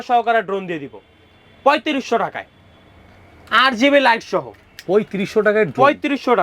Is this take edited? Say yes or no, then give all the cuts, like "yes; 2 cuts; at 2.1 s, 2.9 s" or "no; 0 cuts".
no; 0 cuts